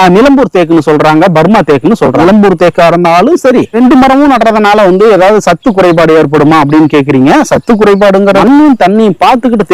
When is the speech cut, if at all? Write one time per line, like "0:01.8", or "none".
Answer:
0:02.2
0:03.8
0:08.4